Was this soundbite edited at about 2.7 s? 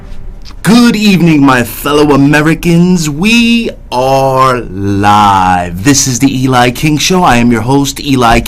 no; 1 cut; at 7.3 s

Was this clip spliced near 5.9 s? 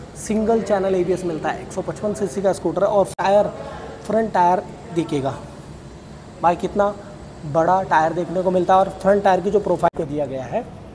no; 2 cuts; at 3.1 s, 9.9 s

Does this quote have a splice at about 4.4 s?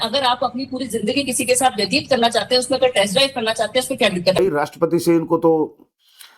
yes; 1 cut; at 4.4 s

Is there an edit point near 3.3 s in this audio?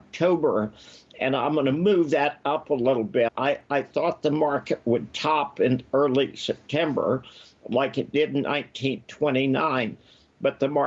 yes; 1 cut; at 3.3 s

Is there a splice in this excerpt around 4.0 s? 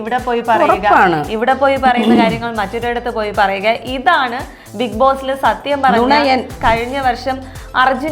no; 1 cut; at 6.5 s

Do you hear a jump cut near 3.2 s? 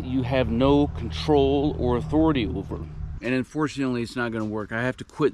yes; 1 cut; at 3.2 s

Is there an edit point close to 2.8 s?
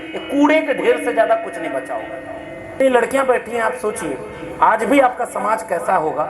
yes; 1 cut; at 2.8 s

